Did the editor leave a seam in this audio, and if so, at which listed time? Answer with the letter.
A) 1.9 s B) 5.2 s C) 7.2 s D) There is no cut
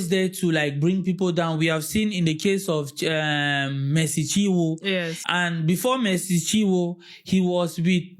B